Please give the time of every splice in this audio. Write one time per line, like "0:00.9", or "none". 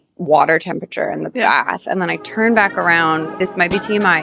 0:03.3